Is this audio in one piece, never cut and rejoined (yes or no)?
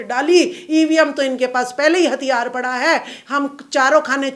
yes